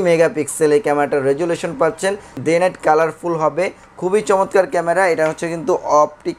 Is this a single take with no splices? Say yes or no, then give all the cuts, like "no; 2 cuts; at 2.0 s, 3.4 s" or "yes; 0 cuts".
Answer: no; 1 cut; at 2.3 s